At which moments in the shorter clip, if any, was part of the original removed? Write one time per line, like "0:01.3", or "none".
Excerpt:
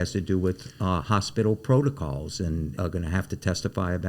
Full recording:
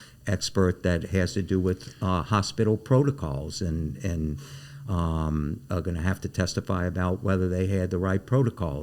0:02.7